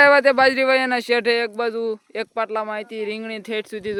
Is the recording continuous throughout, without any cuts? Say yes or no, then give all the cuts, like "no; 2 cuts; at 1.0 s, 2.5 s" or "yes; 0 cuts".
yes; 0 cuts